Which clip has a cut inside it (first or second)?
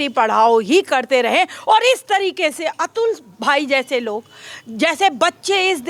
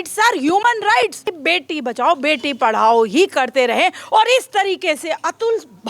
second